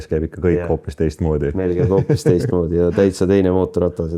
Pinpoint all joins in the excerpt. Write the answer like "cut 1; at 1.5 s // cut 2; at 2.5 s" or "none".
none